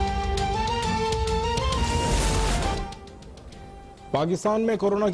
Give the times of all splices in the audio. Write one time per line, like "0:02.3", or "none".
0:00.9